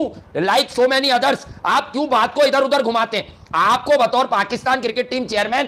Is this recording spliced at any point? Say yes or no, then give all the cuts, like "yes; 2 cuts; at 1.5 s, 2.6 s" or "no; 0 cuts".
no; 0 cuts